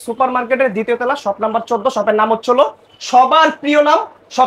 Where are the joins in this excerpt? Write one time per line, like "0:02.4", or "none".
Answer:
none